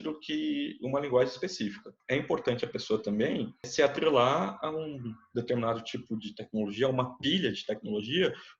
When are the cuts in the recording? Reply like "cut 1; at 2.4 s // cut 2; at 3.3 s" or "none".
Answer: cut 1; at 1.9 s // cut 2; at 3.7 s